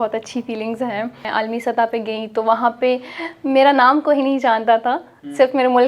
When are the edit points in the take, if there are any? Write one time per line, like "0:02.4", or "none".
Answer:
0:01.3